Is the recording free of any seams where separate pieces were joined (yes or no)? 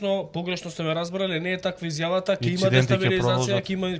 yes